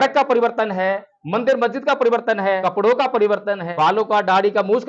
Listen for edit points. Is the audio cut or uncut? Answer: cut